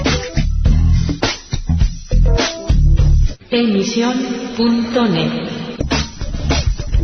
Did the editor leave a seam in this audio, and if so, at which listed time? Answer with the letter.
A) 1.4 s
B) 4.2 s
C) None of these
C